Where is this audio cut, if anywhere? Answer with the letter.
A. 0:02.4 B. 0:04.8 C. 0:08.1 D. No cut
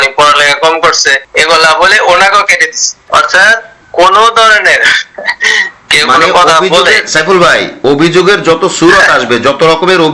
D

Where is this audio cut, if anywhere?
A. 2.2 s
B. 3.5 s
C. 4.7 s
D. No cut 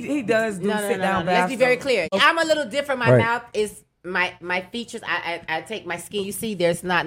A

